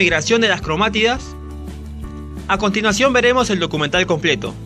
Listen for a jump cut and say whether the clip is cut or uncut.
cut